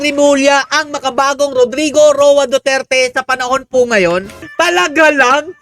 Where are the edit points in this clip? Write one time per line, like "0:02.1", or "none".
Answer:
0:04.4